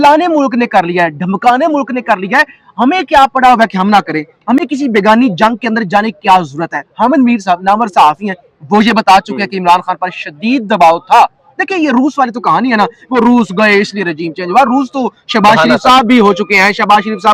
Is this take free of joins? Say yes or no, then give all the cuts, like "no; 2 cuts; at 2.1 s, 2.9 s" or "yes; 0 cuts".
yes; 0 cuts